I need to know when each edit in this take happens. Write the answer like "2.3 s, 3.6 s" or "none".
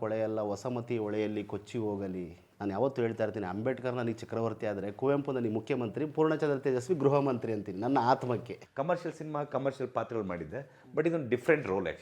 2.5 s, 8.6 s